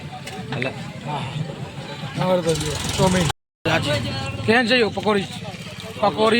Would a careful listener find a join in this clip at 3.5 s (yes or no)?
yes